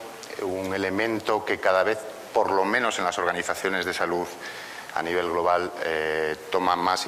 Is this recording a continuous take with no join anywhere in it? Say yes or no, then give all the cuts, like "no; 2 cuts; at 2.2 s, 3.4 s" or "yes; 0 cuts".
yes; 0 cuts